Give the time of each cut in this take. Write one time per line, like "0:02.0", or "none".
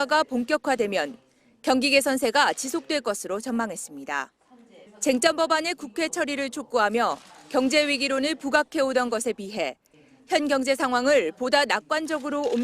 0:05.5